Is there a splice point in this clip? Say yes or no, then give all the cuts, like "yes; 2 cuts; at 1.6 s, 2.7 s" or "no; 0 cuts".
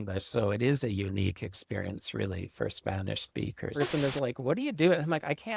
yes; 1 cut; at 3.7 s